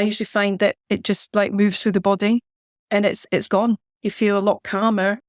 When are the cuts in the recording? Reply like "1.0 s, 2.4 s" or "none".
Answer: 3.9 s